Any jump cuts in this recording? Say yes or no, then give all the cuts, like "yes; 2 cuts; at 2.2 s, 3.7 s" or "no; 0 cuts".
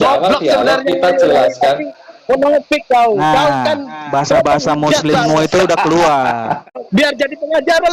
yes; 1 cut; at 6.8 s